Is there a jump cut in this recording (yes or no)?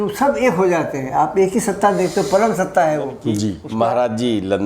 yes